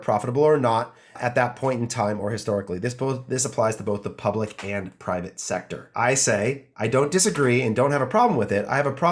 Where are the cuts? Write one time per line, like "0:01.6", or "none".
0:01.2
0:05.8